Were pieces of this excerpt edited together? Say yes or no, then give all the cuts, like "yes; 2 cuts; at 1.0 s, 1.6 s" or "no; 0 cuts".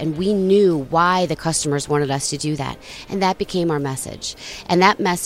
no; 0 cuts